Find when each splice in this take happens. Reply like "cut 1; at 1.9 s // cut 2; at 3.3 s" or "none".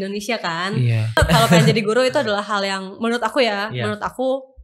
cut 1; at 1.2 s